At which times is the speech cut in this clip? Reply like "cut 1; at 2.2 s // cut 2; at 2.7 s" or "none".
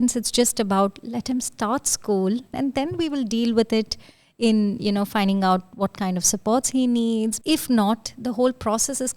cut 1; at 2.6 s // cut 2; at 7.4 s